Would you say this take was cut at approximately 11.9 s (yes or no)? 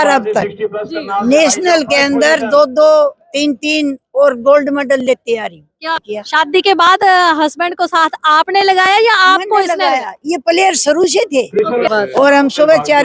yes